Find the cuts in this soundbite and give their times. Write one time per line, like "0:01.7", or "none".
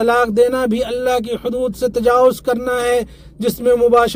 none